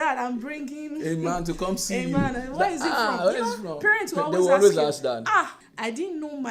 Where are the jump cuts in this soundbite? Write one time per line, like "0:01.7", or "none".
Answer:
0:05.6